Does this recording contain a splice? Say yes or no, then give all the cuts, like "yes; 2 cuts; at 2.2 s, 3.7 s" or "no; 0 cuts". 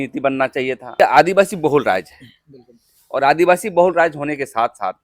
yes; 1 cut; at 1.0 s